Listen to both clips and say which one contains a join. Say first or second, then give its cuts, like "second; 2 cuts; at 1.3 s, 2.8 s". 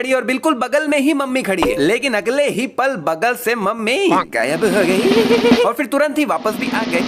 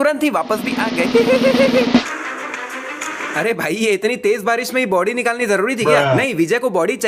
second; 1 cut; at 2.2 s